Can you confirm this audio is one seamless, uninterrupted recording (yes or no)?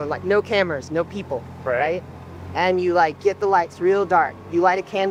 yes